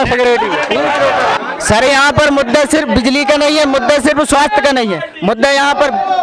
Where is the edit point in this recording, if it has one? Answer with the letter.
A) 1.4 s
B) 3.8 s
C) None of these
A